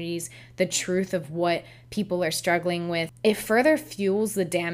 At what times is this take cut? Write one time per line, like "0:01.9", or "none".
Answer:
0:03.1